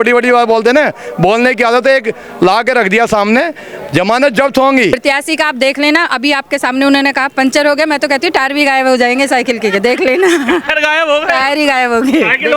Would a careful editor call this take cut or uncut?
cut